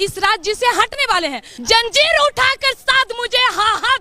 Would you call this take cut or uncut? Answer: cut